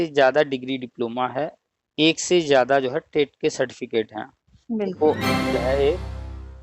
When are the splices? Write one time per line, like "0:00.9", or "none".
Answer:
0:05.5